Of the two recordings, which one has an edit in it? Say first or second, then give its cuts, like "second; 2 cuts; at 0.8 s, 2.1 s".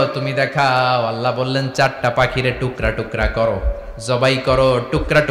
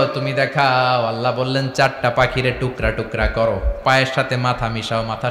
second; 1 cut; at 3.7 s